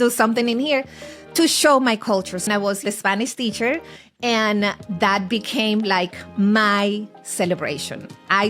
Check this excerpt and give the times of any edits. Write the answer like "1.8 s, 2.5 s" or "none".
2.5 s